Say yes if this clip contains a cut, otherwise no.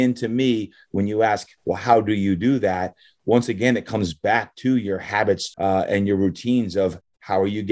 yes